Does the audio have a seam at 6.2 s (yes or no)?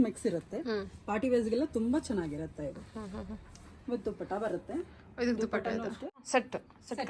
yes